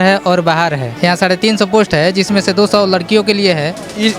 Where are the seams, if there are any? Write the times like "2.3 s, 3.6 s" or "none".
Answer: 0.9 s